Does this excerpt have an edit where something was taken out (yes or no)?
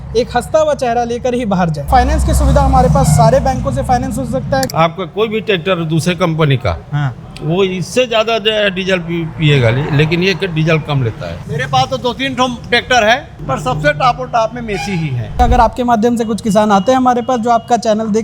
yes